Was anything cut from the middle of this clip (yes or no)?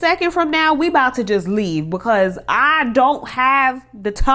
no